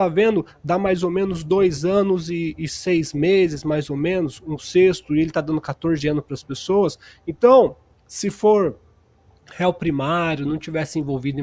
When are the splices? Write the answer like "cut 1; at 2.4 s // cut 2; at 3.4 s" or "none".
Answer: none